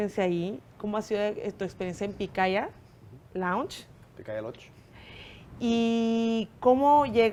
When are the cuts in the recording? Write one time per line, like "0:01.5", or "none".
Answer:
none